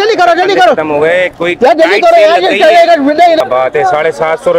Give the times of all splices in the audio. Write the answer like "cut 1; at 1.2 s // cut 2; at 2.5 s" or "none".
cut 1; at 3.4 s